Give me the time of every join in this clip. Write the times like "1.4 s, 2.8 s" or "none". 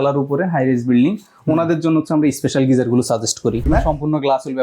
3.6 s